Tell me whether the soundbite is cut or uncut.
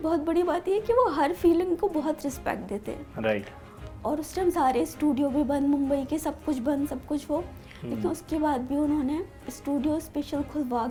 uncut